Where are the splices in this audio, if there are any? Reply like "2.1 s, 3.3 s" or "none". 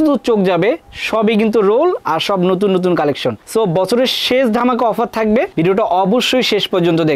none